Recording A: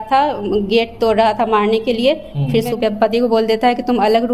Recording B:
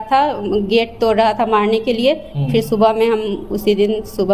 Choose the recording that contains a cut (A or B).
A